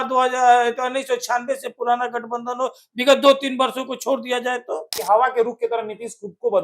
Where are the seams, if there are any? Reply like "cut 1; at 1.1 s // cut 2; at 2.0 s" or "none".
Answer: cut 1; at 4.9 s